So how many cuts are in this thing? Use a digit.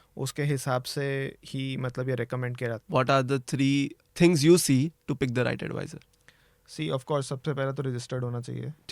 2